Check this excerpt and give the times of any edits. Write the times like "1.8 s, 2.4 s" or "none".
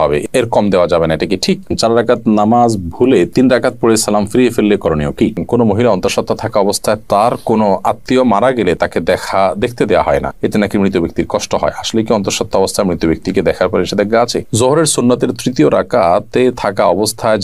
1.7 s, 5.4 s, 14.4 s